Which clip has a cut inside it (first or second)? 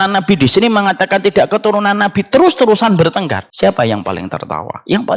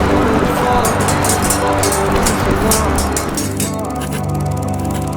first